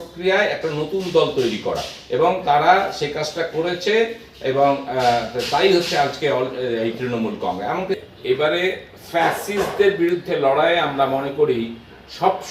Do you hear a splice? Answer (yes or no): yes